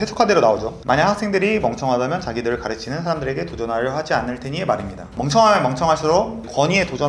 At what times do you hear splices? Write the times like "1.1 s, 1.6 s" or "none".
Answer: none